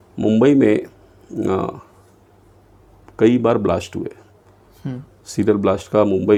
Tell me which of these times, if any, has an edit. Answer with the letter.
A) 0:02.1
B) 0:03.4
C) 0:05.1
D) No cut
D